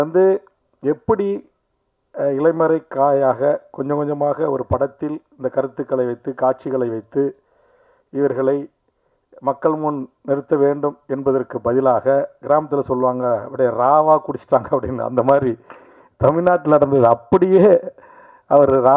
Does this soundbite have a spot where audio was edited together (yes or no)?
no